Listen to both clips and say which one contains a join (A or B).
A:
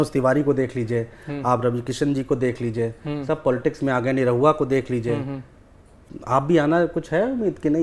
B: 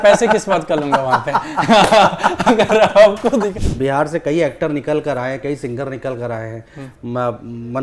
B